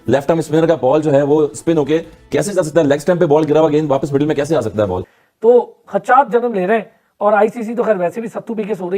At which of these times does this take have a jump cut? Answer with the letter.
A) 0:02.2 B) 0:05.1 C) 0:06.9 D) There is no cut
B